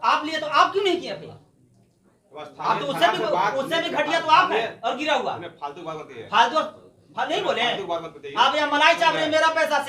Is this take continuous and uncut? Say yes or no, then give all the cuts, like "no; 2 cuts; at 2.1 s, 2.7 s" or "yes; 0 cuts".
yes; 0 cuts